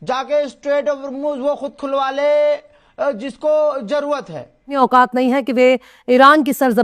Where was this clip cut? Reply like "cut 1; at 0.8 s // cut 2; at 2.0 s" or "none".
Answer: cut 1; at 4.7 s